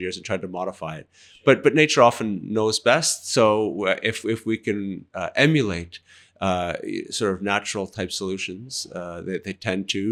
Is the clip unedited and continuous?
yes; 0 cuts

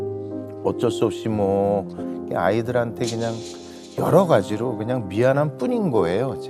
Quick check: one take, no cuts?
yes; 0 cuts

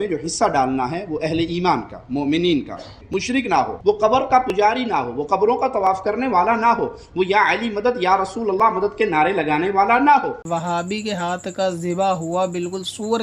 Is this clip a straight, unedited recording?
no; 1 cut; at 10.4 s

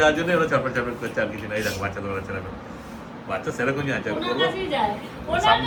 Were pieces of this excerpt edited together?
no; 0 cuts

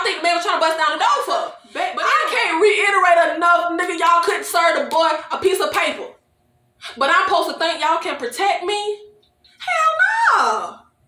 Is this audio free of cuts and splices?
no; 1 cut; at 1.6 s

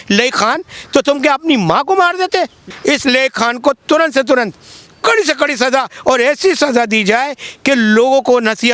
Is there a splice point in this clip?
yes; 1 cut; at 2.7 s

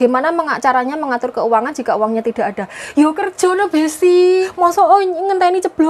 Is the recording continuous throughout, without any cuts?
no; 1 cut; at 4.5 s

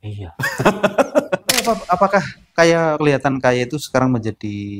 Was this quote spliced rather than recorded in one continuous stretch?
yes; 1 cut; at 1.6 s

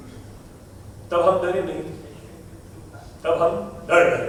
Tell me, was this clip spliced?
no; 0 cuts

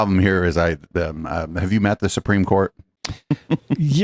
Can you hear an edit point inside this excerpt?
no; 0 cuts

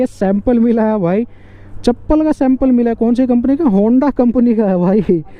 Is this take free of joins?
yes; 0 cuts

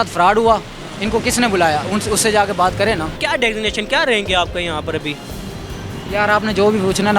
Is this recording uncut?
no; 1 cut; at 3.2 s

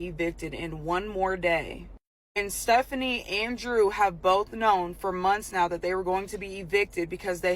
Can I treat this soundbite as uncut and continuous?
yes; 0 cuts

